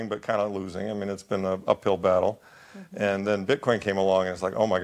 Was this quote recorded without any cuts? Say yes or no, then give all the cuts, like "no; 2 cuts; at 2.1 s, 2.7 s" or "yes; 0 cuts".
yes; 0 cuts